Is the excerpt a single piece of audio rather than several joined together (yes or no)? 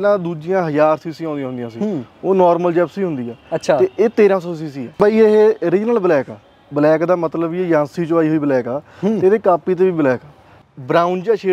no